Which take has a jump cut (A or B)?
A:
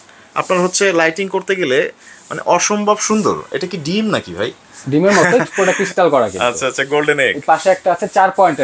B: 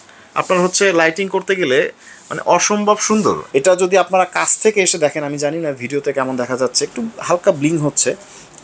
B